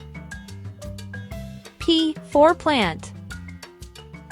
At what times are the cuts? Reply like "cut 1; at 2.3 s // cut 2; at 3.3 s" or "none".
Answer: cut 1; at 1.6 s // cut 2; at 3.0 s